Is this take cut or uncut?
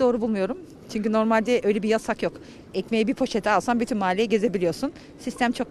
uncut